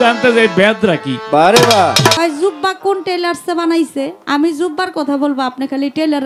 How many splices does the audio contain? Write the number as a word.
two